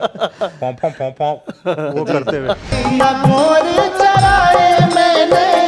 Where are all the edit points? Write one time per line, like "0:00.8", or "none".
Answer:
0:02.7